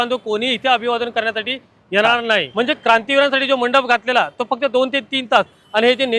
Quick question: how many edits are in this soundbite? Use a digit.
1